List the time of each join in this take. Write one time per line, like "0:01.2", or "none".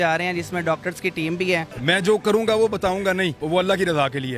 0:01.7
0:03.4